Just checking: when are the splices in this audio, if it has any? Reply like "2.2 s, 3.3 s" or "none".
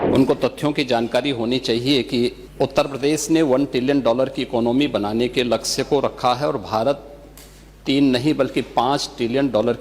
2.4 s